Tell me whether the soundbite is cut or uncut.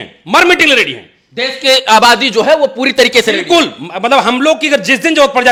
uncut